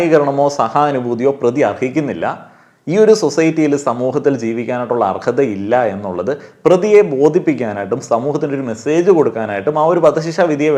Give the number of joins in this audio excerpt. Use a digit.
0